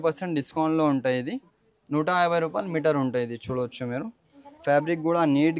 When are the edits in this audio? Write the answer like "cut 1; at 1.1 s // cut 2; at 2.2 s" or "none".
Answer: none

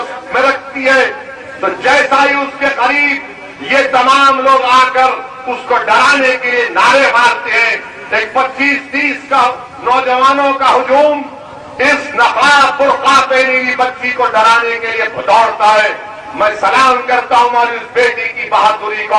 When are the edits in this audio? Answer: none

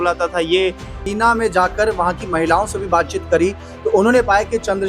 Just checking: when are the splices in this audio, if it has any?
cut 1; at 1.1 s

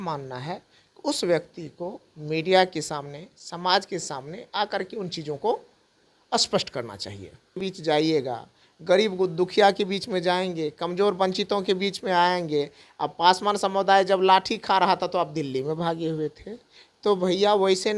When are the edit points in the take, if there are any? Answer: cut 1; at 7.7 s

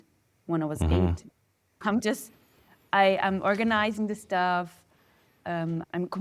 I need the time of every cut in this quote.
cut 1; at 1.8 s

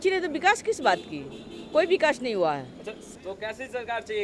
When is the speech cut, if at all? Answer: none

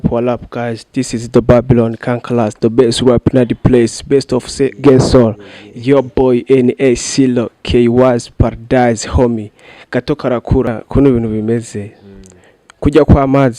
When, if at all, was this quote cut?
cut 1; at 10.7 s

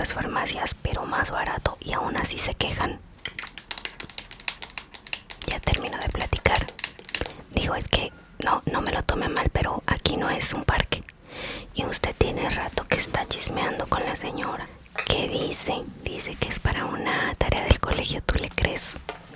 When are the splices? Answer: cut 1; at 3.1 s // cut 2; at 14.7 s

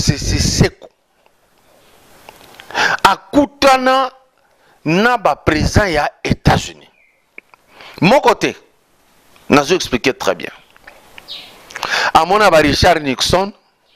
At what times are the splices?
none

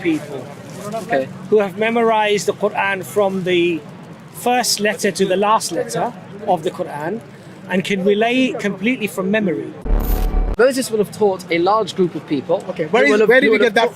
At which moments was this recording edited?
cut 1; at 10.0 s

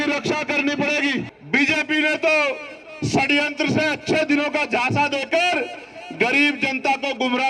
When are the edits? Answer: cut 1; at 1.4 s

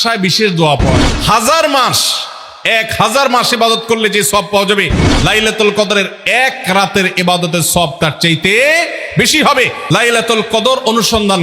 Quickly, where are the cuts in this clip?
cut 1; at 0.9 s // cut 2; at 9.8 s

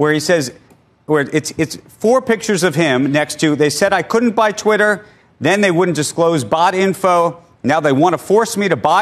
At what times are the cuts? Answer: none

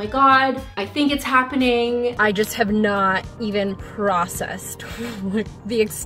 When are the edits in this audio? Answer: cut 1; at 2.2 s

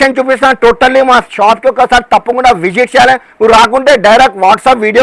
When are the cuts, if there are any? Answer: none

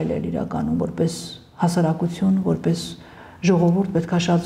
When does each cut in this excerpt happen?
none

